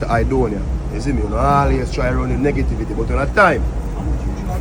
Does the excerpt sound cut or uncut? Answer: uncut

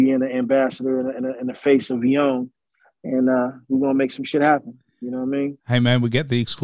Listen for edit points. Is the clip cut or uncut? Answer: cut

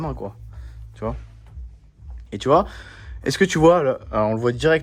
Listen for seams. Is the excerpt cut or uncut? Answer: uncut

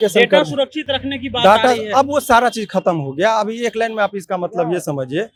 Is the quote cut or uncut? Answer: uncut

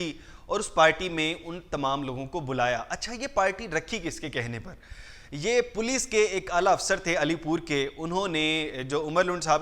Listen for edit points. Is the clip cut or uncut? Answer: uncut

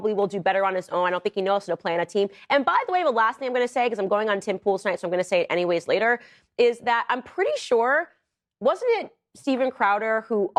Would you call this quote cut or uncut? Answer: uncut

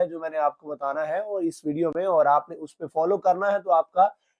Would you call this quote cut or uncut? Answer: uncut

